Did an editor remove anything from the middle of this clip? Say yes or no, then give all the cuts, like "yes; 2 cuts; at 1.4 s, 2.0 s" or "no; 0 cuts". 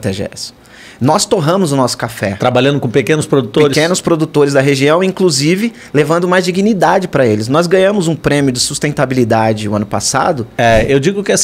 yes; 1 cut; at 10.5 s